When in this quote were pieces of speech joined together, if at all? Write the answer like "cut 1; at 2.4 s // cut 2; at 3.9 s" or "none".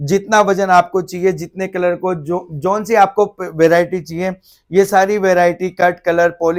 none